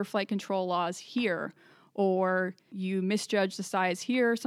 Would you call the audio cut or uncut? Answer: cut